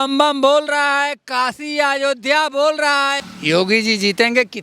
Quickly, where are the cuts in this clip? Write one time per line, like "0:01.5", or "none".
0:03.2